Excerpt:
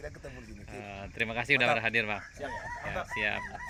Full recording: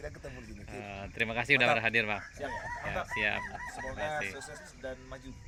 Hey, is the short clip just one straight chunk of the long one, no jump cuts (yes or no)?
yes